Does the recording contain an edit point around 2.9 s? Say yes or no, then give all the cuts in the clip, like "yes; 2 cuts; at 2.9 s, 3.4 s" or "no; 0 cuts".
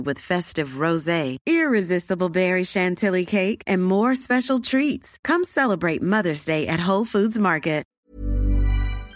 no; 1 cut; at 8.1 s